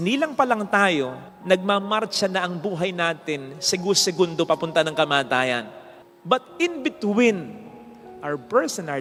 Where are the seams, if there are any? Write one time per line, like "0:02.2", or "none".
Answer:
none